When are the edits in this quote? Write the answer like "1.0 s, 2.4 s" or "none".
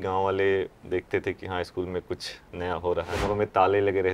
3.1 s